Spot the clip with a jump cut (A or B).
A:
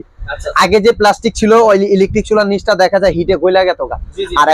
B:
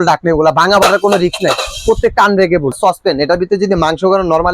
B